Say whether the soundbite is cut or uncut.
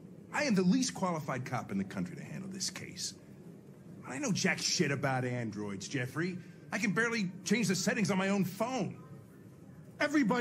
cut